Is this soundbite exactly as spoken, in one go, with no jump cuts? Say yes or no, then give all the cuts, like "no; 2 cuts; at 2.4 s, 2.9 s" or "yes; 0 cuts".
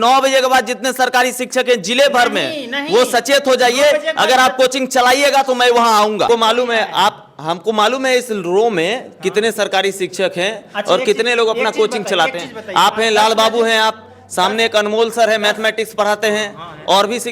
no; 1 cut; at 6.3 s